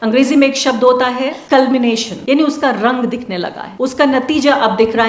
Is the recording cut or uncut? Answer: cut